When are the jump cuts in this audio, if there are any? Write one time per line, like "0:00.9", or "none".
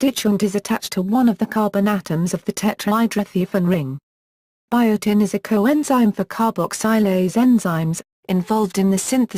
0:06.2